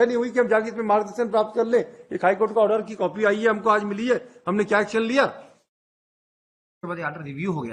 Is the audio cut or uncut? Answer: uncut